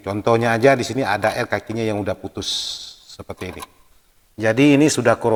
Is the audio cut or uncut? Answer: uncut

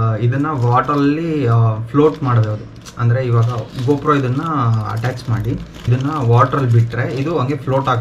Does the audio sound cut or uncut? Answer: uncut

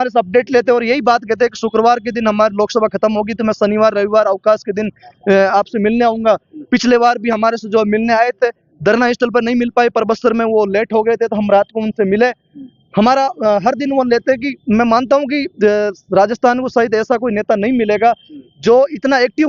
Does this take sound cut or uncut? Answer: uncut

